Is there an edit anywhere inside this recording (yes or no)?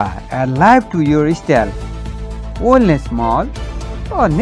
no